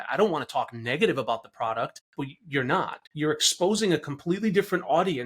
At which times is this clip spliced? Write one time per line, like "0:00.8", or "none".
0:02.0
0:03.0